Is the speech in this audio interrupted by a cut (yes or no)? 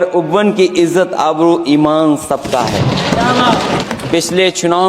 yes